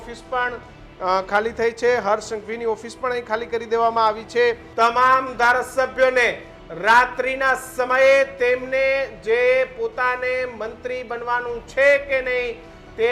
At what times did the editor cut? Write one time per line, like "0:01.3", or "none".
0:04.6